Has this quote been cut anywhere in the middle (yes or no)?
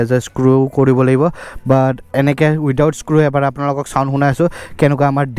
no